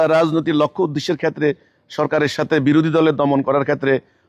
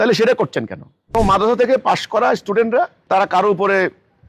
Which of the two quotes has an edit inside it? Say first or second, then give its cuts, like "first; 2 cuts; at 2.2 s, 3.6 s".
second; 2 cuts; at 1.1 s, 3.0 s